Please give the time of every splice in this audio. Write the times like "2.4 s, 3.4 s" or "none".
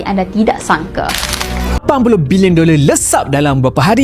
1.8 s